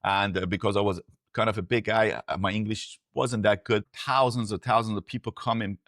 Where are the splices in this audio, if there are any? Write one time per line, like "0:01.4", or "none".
0:03.8